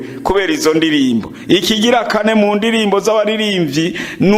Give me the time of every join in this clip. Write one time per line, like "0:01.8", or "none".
none